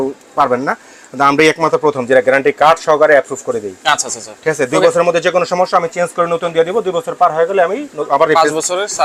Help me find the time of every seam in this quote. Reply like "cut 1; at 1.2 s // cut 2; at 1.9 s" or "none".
none